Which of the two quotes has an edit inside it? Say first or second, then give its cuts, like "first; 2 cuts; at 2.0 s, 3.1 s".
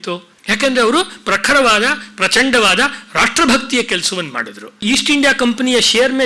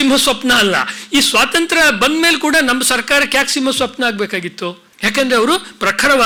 first; 1 cut; at 4.8 s